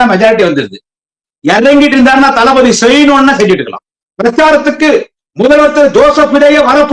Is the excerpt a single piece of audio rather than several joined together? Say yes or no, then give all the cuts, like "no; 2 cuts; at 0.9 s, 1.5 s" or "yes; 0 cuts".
no; 1 cut; at 3.9 s